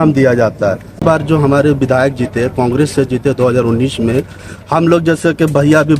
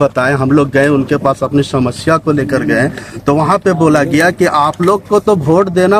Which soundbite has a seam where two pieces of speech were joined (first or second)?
first